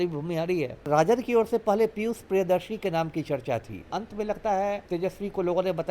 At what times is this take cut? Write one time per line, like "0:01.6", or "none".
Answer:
0:00.9
0:03.8
0:04.8